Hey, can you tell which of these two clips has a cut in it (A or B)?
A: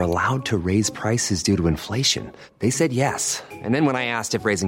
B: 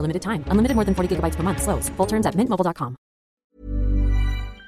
B